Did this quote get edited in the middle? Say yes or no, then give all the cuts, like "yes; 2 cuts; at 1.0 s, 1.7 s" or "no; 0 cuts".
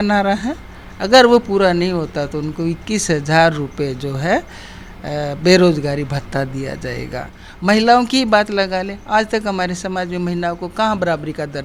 no; 0 cuts